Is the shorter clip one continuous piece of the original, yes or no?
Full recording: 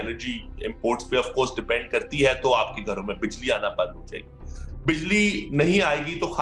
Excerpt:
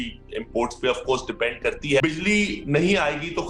no